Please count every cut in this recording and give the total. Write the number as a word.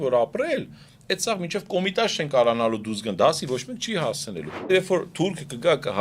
one